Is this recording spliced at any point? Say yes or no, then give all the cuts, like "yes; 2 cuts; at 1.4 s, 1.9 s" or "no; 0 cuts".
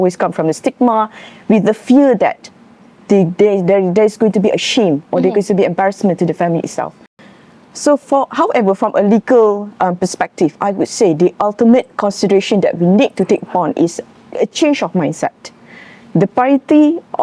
no; 0 cuts